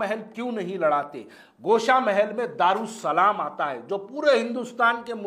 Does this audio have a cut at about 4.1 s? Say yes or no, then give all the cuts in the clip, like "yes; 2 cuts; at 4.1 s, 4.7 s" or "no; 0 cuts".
no; 0 cuts